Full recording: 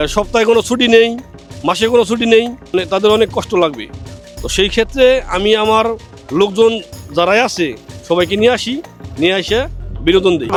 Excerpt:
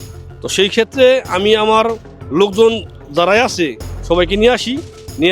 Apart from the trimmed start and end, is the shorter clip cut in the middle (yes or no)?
no